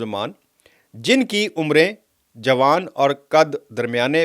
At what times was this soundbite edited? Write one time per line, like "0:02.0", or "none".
none